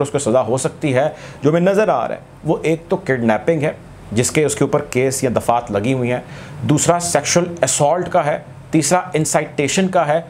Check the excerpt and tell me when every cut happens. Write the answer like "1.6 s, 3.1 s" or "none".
none